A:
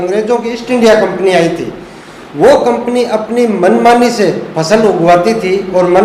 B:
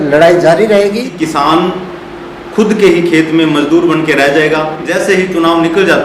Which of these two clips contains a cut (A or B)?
B